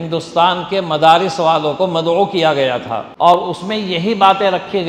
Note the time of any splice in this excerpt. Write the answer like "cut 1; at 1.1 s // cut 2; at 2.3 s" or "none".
cut 1; at 3.1 s